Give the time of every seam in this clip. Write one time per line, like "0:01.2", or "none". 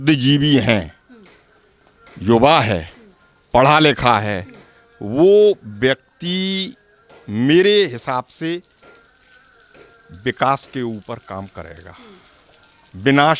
none